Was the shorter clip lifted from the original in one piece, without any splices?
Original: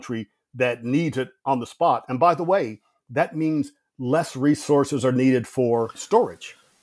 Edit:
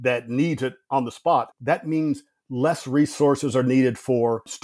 no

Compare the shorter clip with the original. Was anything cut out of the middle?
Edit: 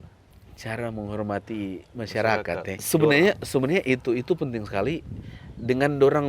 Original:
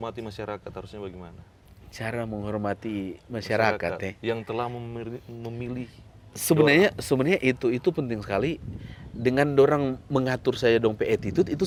yes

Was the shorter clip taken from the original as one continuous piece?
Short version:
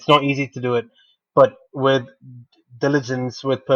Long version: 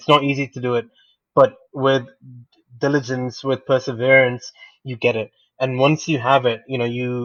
yes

